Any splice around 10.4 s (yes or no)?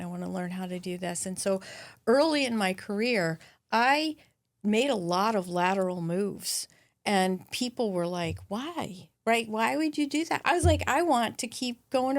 yes